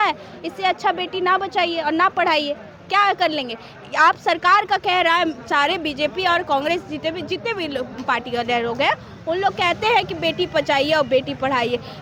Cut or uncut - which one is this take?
uncut